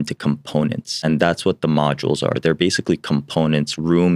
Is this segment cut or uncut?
cut